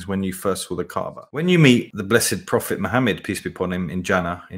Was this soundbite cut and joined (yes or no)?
yes